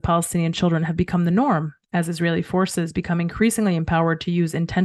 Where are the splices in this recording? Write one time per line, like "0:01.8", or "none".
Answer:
none